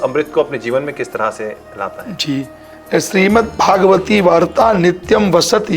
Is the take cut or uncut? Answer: uncut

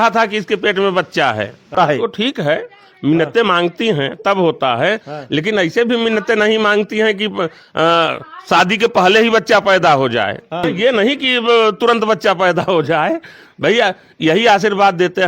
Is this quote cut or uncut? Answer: cut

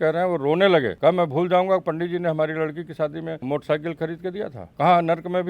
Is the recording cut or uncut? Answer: cut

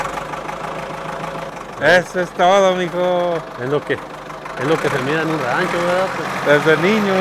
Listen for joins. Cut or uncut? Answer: cut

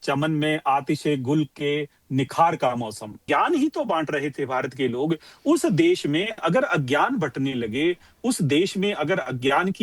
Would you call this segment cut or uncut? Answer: cut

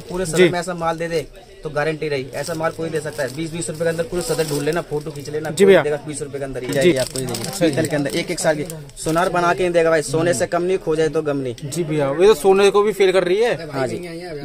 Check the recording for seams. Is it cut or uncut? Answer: cut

